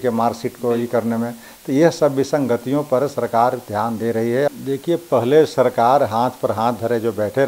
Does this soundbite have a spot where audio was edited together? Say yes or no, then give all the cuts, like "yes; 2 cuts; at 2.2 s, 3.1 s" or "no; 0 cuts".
yes; 1 cut; at 4.5 s